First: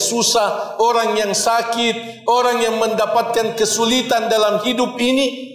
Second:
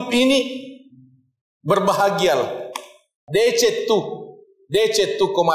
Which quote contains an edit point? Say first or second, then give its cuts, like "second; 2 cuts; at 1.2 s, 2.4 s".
second; 1 cut; at 3.1 s